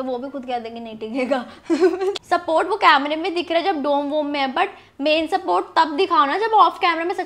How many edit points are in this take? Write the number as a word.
one